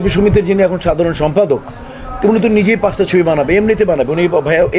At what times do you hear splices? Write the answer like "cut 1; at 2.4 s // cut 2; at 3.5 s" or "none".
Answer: none